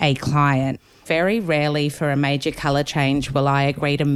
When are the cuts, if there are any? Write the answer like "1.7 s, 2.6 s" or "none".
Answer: 1.0 s